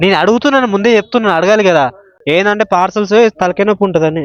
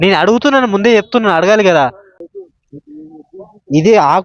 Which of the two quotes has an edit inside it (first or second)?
second